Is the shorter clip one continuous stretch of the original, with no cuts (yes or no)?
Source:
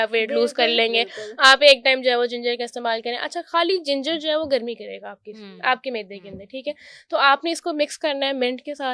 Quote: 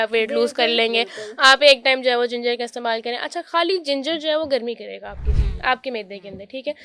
yes